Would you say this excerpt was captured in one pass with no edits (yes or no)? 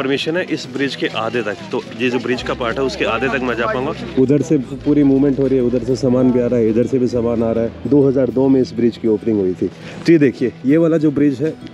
yes